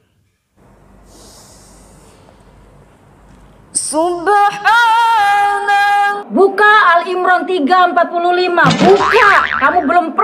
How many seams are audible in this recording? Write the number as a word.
one